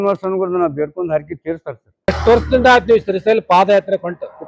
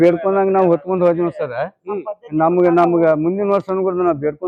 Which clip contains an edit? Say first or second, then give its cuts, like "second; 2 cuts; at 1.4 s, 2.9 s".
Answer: first; 1 cut; at 2.1 s